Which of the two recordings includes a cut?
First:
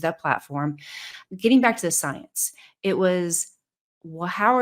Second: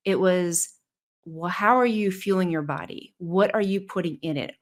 first; 1 cut; at 1.2 s

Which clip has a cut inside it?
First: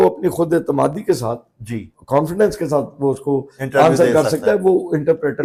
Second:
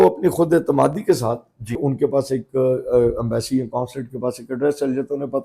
second; 1 cut; at 1.8 s

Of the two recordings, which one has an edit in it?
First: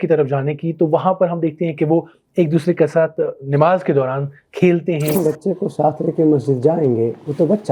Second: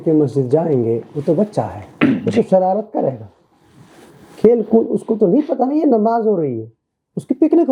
first; 1 cut; at 5.2 s

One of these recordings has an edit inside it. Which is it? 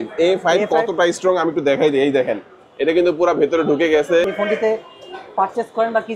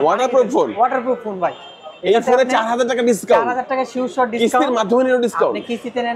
first; 1 cut; at 4.2 s

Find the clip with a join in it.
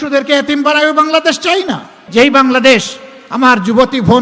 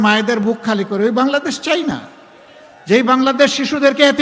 first; 1 cut; at 1.9 s

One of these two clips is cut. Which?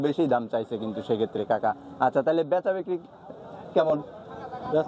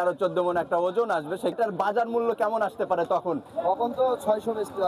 second; 1 cut; at 1.5 s

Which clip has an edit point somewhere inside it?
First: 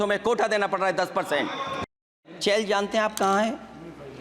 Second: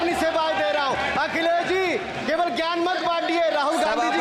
first; 1 cut; at 2.2 s

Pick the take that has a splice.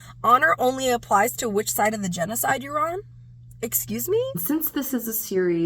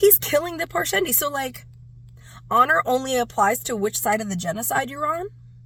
first; 1 cut; at 4.4 s

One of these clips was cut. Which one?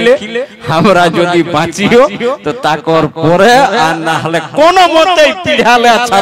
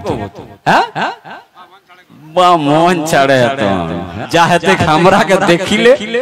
second; 1 cut; at 4.1 s

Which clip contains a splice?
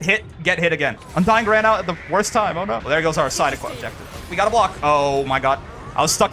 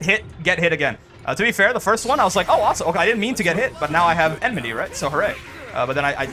first; 3 cuts; at 1.0 s, 2.8 s, 4.2 s

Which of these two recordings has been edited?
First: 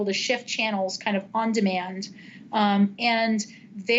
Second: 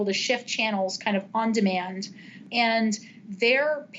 second; 1 cut; at 2.5 s

